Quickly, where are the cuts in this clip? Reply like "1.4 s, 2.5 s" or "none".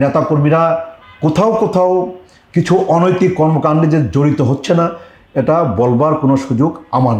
none